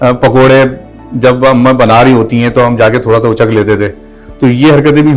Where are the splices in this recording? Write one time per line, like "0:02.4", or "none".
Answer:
none